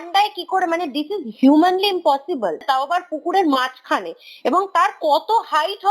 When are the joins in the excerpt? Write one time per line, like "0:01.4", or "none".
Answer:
0:02.6